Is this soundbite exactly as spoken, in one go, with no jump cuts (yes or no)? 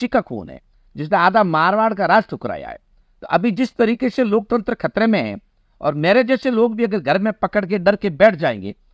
yes